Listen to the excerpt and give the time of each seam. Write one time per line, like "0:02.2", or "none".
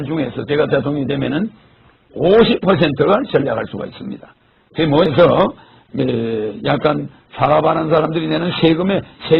0:05.1